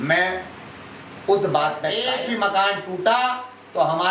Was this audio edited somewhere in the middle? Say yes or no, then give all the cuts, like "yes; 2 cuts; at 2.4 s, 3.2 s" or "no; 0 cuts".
yes; 1 cut; at 2.0 s